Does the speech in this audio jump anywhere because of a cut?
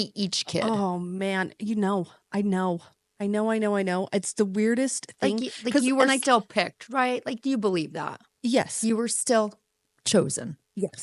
no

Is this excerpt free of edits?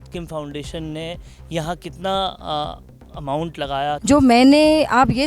no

